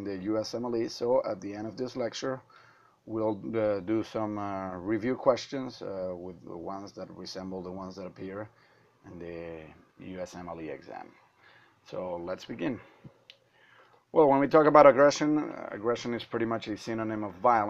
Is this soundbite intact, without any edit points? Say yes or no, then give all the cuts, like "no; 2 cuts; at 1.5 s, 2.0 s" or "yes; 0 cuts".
no; 1 cut; at 10.3 s